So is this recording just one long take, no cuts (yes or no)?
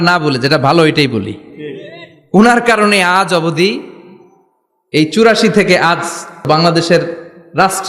no